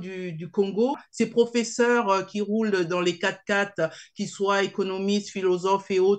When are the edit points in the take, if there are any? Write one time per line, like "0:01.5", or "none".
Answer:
0:01.0